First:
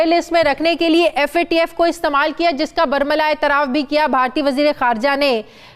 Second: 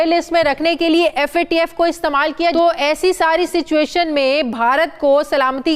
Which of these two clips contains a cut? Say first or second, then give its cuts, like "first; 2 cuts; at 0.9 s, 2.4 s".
second; 1 cut; at 2.5 s